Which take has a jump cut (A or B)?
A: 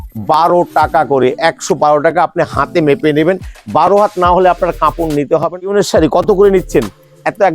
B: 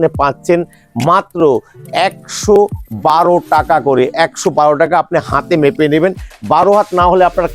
A